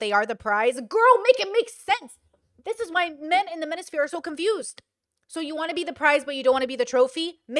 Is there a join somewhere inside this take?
no; 0 cuts

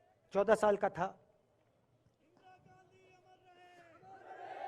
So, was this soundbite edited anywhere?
no; 0 cuts

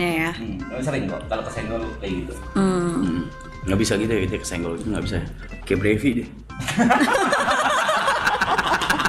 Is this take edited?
no; 0 cuts

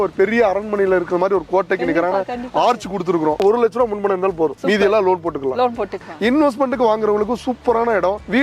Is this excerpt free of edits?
no; 2 cuts; at 3.4 s, 6.0 s

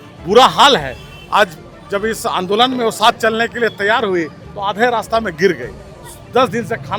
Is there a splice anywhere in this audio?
no; 0 cuts

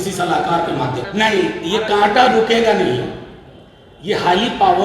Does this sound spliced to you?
yes; 1 cut; at 1.0 s

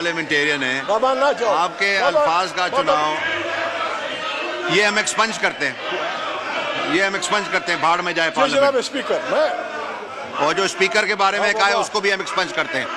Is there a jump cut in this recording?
no; 0 cuts

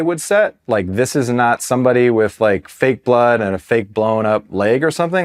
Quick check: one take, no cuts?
yes; 0 cuts

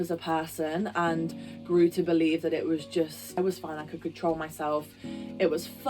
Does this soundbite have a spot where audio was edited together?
yes; 2 cuts; at 1.5 s, 3.4 s

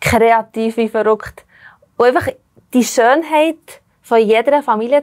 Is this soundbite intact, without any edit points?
yes; 0 cuts

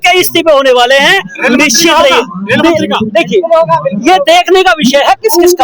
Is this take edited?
no; 0 cuts

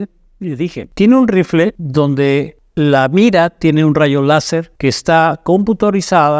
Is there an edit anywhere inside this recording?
yes; 4 cuts; at 0.8 s, 1.8 s, 2.6 s, 4.7 s

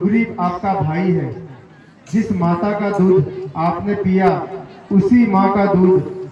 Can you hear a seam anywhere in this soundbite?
no; 0 cuts

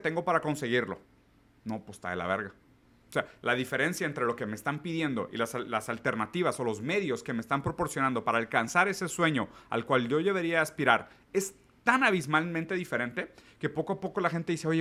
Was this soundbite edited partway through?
no; 0 cuts

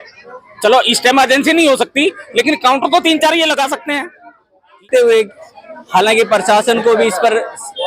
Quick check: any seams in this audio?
yes; 1 cut; at 4.8 s

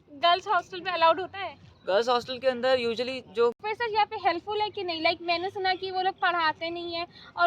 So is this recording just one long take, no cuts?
no; 1 cut; at 3.6 s

